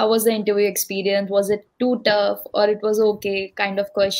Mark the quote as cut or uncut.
uncut